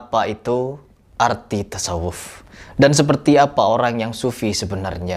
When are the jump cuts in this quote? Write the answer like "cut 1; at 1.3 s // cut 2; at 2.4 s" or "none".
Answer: none